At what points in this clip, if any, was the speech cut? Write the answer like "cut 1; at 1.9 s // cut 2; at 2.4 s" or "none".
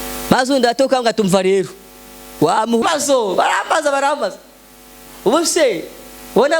cut 1; at 2.8 s

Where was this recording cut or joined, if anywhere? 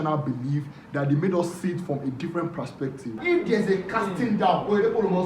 cut 1; at 3.1 s

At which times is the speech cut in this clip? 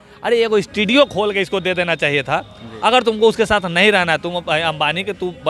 none

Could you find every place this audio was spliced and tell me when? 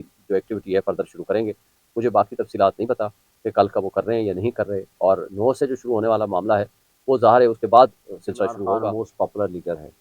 cut 1; at 8.7 s

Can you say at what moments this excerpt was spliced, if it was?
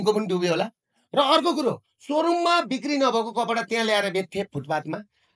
none

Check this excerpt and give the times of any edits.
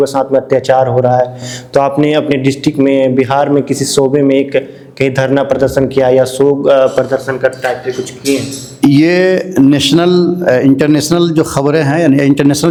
none

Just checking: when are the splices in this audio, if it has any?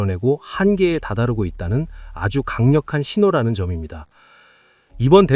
none

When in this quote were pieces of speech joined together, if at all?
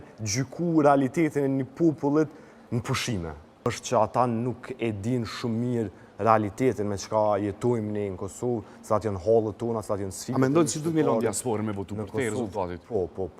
cut 1; at 3.7 s

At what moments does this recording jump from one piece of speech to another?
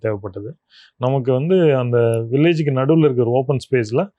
none

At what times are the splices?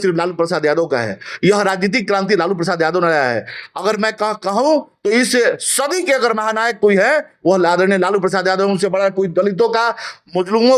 none

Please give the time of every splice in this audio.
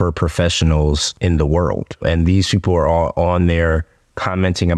cut 1; at 1.1 s // cut 2; at 2.0 s

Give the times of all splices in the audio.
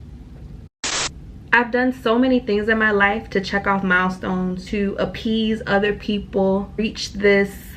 cut 1; at 1.1 s // cut 2; at 4.6 s // cut 3; at 6.8 s

